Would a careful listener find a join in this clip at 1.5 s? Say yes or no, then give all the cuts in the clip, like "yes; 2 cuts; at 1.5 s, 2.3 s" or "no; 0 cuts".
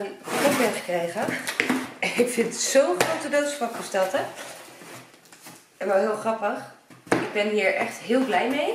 no; 0 cuts